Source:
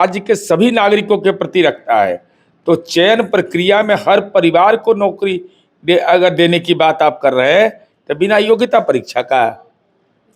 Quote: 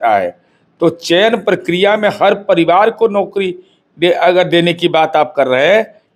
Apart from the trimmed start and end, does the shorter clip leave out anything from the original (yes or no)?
no